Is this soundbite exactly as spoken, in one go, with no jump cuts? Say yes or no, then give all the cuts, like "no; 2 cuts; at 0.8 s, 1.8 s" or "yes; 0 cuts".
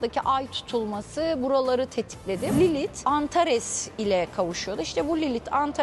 no; 1 cut; at 2.5 s